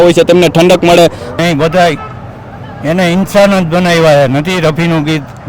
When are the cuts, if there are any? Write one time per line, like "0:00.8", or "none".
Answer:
0:01.3